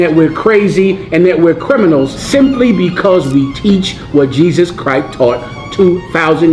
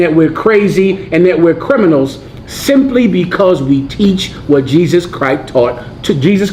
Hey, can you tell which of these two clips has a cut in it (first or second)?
first